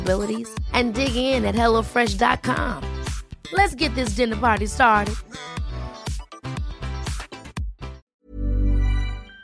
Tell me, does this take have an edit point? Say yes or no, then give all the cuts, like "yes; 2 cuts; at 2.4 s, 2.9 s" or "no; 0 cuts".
yes; 1 cut; at 8.0 s